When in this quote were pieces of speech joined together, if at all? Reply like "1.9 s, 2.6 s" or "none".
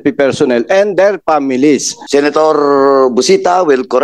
1.9 s